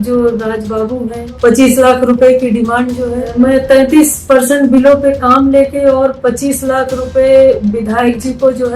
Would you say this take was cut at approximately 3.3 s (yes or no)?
yes